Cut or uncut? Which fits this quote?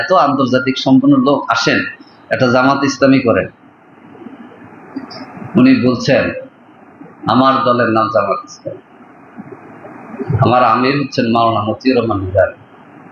uncut